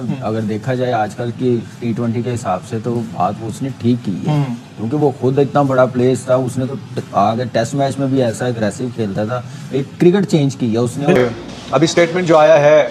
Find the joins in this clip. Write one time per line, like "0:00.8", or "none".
0:11.2